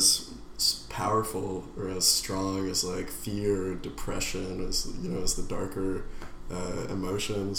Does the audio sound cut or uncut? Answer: uncut